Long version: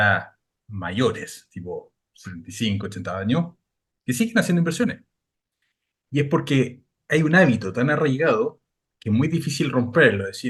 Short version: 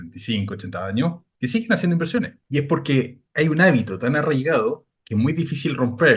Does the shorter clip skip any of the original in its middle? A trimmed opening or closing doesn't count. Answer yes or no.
yes